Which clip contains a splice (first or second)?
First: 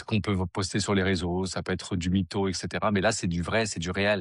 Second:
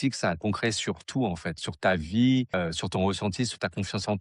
second